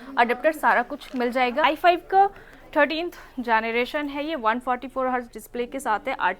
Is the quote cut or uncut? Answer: cut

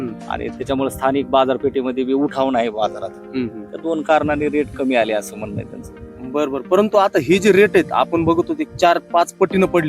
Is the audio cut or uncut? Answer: uncut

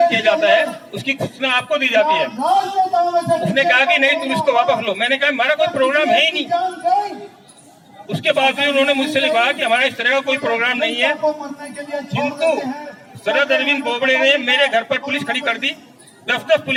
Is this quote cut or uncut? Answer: uncut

